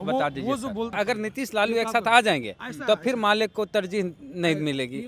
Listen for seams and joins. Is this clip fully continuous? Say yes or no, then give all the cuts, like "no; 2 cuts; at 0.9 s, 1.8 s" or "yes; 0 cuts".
no; 1 cut; at 0.9 s